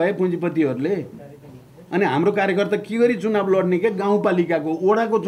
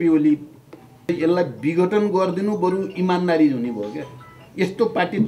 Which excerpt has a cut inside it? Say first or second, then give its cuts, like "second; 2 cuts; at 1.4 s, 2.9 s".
second; 1 cut; at 1.1 s